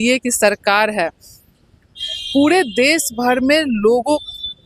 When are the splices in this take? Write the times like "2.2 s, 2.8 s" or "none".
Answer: none